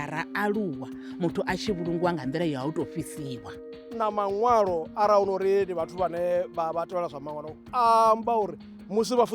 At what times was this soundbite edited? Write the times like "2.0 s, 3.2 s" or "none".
3.8 s